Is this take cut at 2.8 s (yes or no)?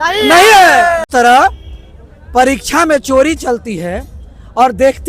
no